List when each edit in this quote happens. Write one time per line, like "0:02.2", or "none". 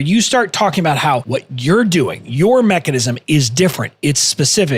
0:01.2